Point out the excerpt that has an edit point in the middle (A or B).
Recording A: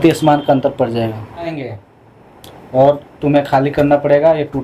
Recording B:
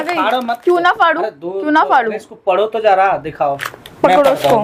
A